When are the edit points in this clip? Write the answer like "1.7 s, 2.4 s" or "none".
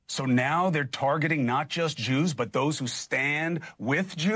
none